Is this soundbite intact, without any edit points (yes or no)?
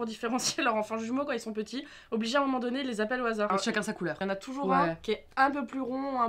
no